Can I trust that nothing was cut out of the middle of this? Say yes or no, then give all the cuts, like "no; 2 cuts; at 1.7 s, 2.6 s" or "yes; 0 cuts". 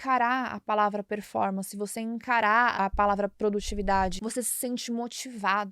no; 2 cuts; at 2.7 s, 4.2 s